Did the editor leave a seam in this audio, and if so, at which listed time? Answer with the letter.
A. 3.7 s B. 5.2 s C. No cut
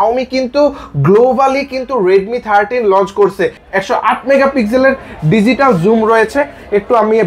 A